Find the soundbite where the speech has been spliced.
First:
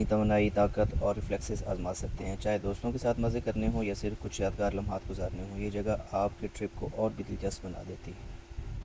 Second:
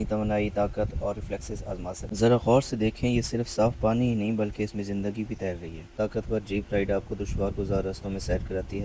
second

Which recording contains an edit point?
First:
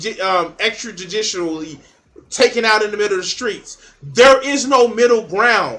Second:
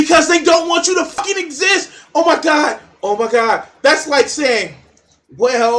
second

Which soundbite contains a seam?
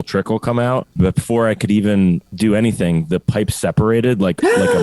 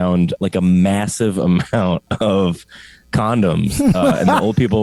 first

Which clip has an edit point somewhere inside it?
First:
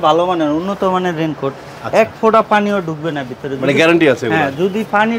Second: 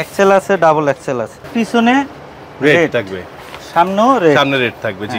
second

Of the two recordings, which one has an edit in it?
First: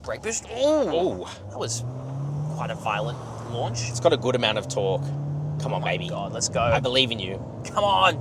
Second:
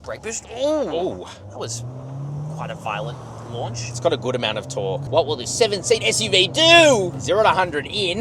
second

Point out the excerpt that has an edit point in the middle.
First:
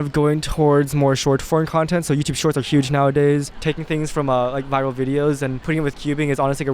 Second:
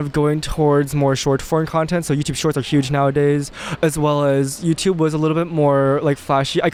first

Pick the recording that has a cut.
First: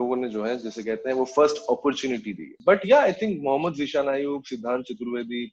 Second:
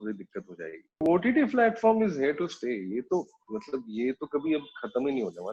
second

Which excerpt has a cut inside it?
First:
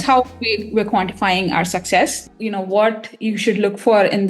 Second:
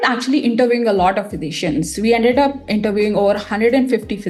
first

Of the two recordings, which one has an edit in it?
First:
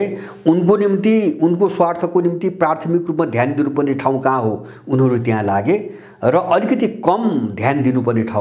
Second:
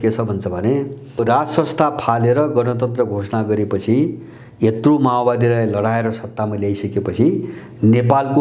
second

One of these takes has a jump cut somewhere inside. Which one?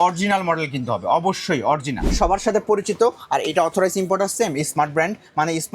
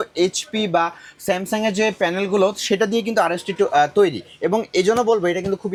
first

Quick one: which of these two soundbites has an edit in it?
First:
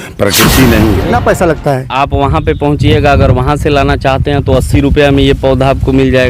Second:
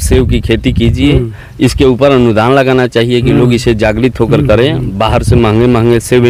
first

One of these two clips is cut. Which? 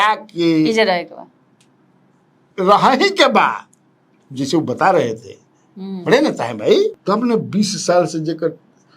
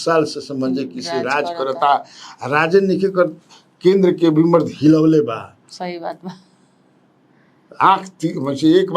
first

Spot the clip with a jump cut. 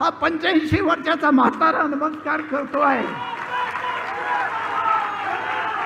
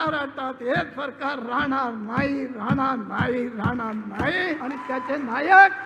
second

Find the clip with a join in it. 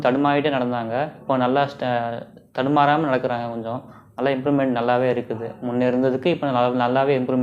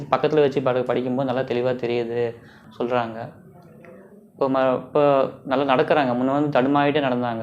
second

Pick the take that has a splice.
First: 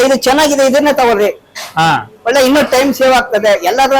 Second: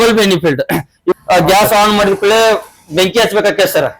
second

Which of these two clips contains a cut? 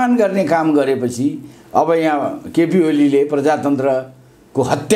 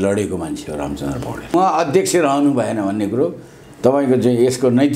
second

